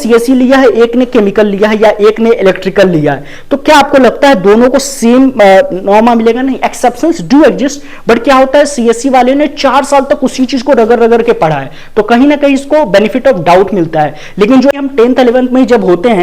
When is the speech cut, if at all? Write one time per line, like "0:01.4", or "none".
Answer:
0:14.7